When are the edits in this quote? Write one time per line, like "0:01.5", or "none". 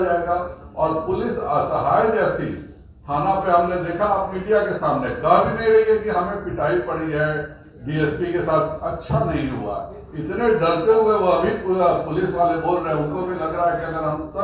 none